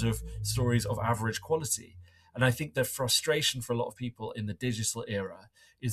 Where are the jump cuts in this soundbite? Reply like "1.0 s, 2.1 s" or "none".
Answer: none